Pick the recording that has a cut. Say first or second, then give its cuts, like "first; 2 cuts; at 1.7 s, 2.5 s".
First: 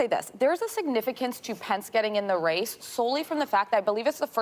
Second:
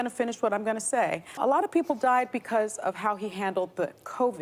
second; 1 cut; at 1.3 s